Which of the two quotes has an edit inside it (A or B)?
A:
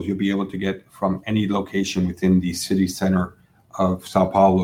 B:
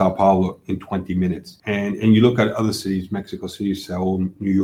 B